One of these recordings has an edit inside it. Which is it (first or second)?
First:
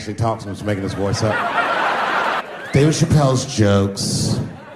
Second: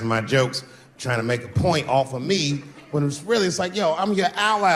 first